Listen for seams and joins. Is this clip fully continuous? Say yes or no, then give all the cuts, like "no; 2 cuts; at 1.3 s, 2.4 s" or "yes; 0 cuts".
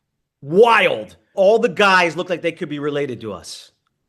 no; 1 cut; at 1.2 s